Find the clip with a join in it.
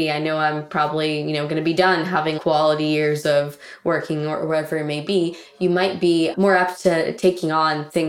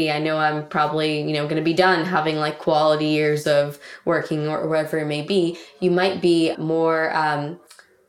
first; 2 cuts; at 2.4 s, 6.3 s

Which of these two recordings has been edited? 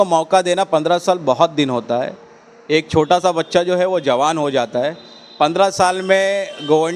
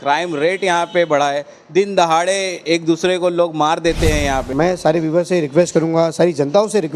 second; 1 cut; at 4.5 s

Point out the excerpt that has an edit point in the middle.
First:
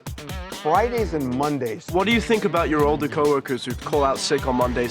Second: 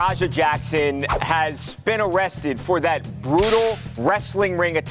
first; 2 cuts; at 1.9 s, 3.7 s

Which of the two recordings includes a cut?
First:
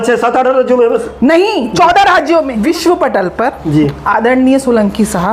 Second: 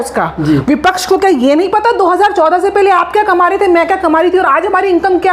first; 1 cut; at 2.5 s

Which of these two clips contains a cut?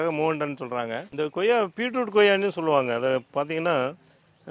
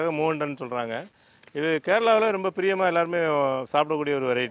first; 1 cut; at 1.0 s

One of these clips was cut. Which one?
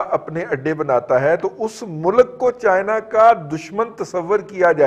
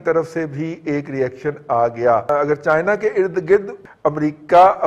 second; 2 cuts; at 2.3 s, 3.7 s

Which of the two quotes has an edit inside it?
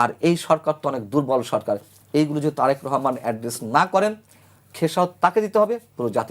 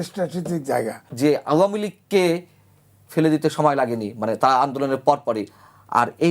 second; 1 cut; at 1.0 s

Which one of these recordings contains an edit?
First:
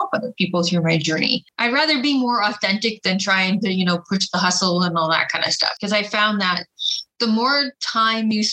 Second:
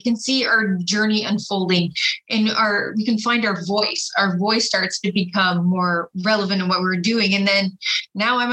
first; 2 cuts; at 1.5 s, 5.8 s

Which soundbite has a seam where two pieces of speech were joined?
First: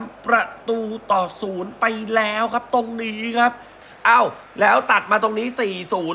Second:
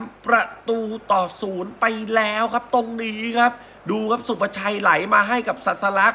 first; 1 cut; at 3.7 s

